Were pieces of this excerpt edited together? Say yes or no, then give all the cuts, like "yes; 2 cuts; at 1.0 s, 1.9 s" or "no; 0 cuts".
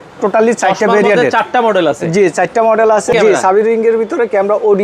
yes; 1 cut; at 3.1 s